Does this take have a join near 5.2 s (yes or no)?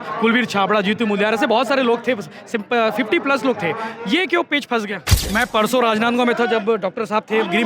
yes